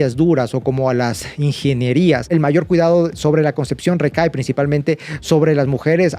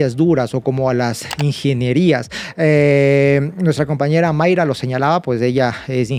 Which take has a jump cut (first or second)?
first